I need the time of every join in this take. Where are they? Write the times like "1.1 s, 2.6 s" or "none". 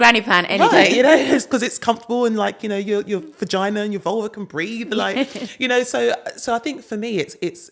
none